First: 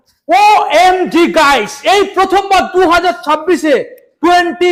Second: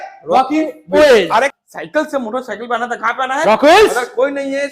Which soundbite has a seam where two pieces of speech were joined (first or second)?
second